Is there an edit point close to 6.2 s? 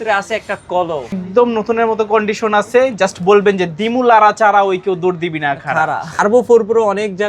yes; 2 cuts; at 1.1 s, 6.2 s

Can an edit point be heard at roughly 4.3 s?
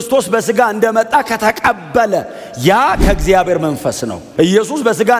yes; 1 cut; at 4.3 s

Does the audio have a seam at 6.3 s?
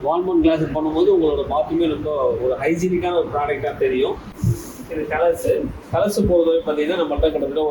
no; 1 cut; at 4.3 s

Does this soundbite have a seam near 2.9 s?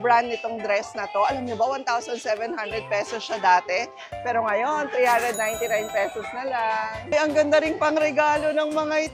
no; 1 cut; at 7.1 s

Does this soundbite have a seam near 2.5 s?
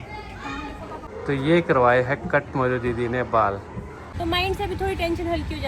no; 2 cuts; at 1.1 s, 4.1 s

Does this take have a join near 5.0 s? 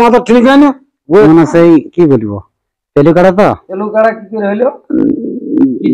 no; 2 cuts; at 1.1 s, 3.7 s

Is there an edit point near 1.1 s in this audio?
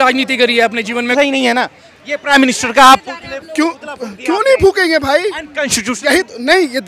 yes; 1 cut; at 1.1 s

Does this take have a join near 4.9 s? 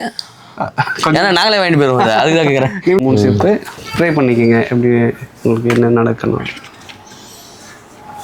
no; 1 cut; at 3.0 s

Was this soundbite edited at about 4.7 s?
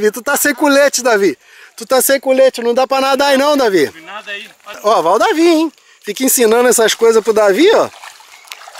yes; 1 cut; at 4.7 s

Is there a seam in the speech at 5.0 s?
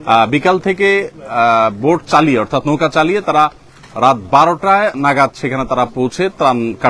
yes; 1 cut; at 5.0 s

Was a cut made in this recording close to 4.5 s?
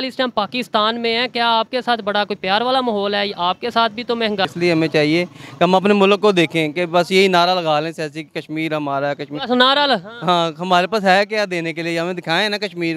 yes; 1 cut; at 4.5 s

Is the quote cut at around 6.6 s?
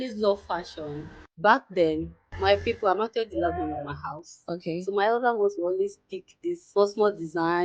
yes; 1 cut; at 6.6 s

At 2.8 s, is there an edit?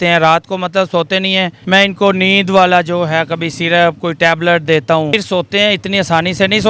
no; 2 cuts; at 1.6 s, 5.2 s

